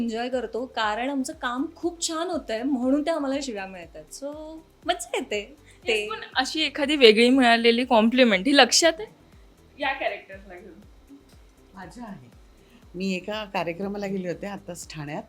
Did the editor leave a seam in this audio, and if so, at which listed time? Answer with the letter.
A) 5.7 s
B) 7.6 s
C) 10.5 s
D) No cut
D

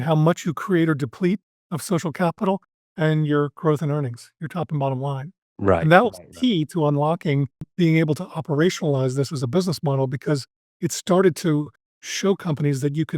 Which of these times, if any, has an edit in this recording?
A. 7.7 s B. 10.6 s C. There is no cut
A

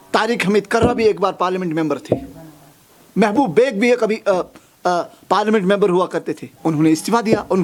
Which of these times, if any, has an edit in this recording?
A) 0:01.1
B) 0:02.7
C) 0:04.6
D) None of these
D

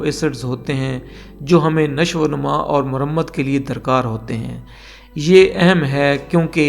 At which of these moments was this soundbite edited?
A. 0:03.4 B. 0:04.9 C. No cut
C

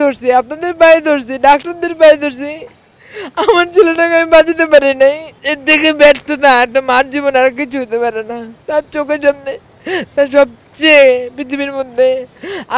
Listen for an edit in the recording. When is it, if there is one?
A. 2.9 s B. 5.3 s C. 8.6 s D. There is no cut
D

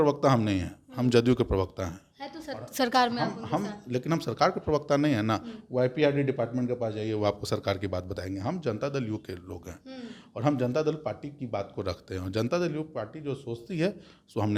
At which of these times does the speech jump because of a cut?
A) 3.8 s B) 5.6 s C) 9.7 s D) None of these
D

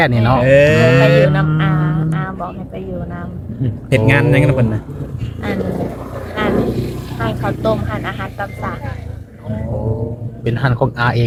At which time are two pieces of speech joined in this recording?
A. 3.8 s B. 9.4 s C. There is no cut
C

